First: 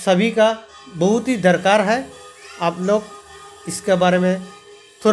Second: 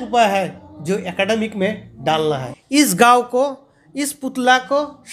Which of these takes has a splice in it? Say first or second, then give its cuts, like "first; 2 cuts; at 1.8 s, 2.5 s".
second; 1 cut; at 2.5 s